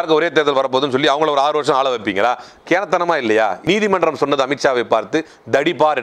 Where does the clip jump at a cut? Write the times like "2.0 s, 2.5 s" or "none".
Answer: 3.6 s